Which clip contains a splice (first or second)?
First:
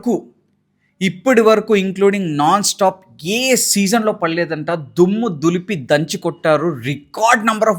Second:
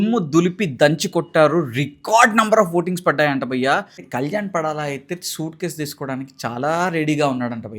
second